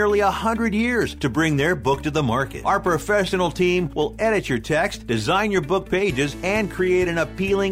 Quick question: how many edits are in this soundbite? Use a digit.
0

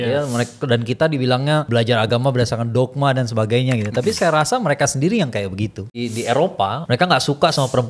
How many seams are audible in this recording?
3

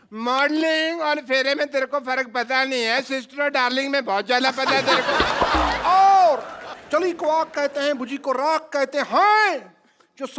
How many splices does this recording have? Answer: 1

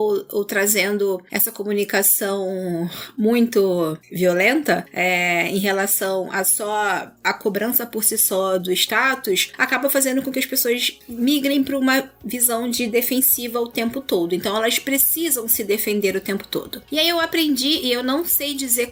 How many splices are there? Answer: 0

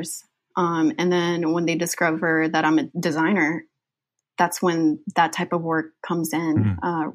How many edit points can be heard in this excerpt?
2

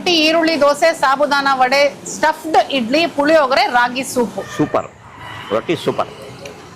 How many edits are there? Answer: 1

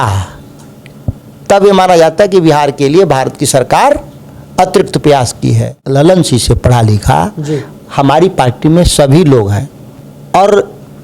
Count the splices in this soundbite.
2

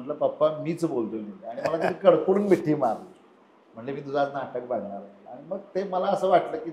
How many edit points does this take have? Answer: 0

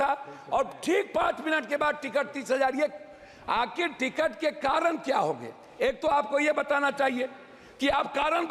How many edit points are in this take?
0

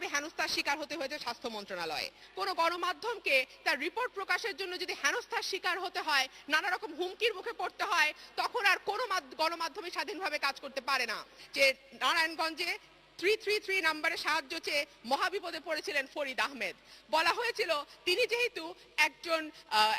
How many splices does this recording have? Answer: 2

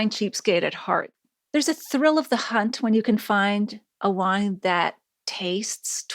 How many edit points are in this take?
1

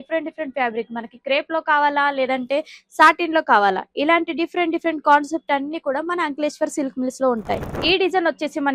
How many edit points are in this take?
1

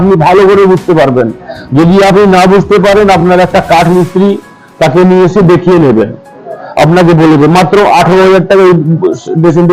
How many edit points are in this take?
0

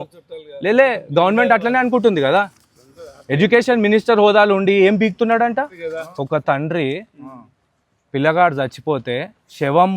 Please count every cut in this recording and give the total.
1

